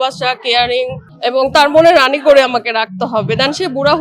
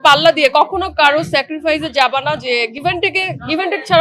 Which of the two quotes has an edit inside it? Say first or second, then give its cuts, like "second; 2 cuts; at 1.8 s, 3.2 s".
first; 1 cut; at 1.0 s